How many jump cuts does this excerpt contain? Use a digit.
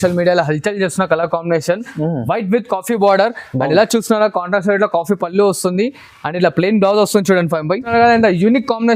1